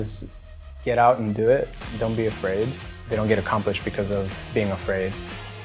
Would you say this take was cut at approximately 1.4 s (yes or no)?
no